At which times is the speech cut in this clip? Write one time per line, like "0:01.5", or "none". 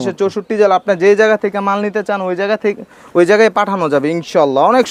none

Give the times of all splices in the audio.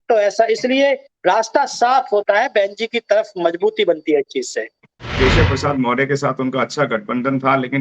0:05.1

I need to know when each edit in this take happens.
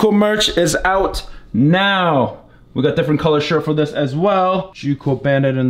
0:04.7

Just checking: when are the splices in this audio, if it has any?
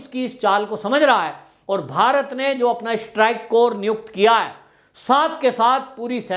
none

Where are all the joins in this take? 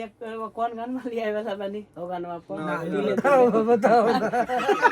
none

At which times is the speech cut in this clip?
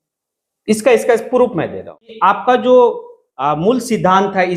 0:02.1

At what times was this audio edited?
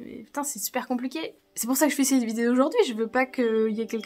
0:01.4

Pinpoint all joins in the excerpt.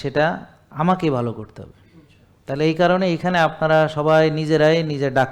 none

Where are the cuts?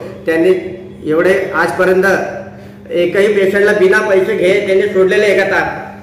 none

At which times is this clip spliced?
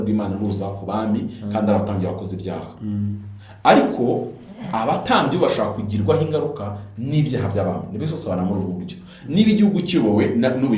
none

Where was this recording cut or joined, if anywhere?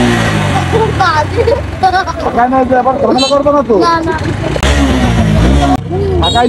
0:04.6
0:05.8

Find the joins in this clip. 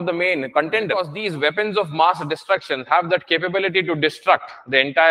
0:01.2

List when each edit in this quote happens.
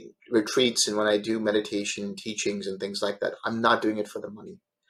none

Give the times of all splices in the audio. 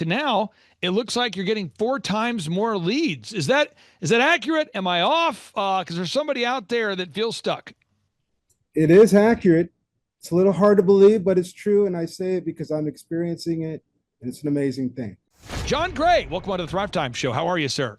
0:15.6

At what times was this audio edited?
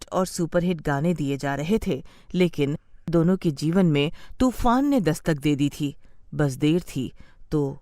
0:02.8

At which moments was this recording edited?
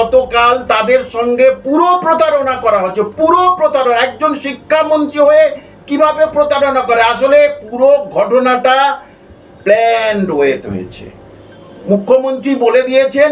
none

